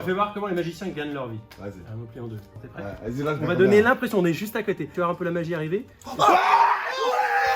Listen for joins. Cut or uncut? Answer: cut